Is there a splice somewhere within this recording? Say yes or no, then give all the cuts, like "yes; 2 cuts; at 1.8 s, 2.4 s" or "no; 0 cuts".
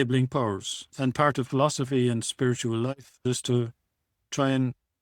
yes; 1 cut; at 0.9 s